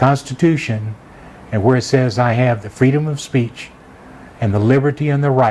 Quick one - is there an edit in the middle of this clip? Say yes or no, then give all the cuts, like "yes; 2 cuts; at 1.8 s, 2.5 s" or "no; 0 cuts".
no; 0 cuts